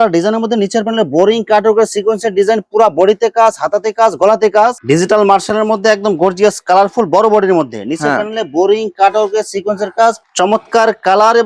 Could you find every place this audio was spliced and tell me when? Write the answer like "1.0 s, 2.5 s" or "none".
4.8 s, 10.2 s